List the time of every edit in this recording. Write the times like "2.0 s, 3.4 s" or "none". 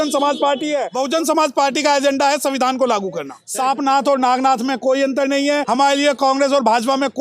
0.9 s, 3.4 s, 5.6 s